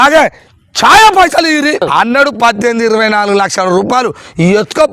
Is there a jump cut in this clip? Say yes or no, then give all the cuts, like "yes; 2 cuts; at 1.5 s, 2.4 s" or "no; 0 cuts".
yes; 1 cut; at 1.8 s